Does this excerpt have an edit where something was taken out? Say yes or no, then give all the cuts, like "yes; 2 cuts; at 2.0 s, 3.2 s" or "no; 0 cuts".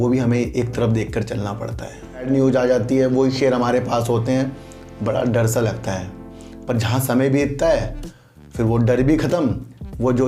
yes; 1 cut; at 2.2 s